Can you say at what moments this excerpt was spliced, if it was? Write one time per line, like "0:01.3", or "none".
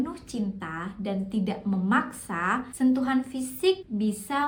none